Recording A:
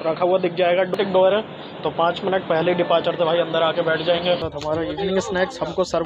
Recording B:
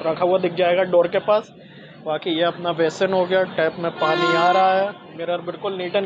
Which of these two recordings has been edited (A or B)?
A